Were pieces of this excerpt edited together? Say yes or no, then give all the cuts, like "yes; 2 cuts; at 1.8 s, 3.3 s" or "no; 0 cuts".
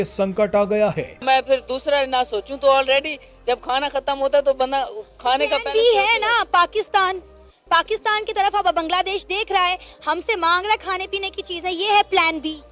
yes; 1 cut; at 1.2 s